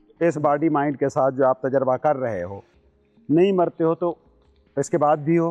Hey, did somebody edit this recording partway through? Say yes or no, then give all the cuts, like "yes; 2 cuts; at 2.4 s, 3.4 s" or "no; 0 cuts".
no; 0 cuts